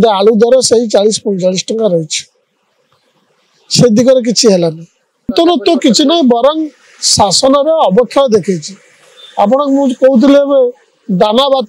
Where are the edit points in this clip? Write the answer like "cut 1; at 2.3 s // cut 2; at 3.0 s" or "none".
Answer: cut 1; at 5.3 s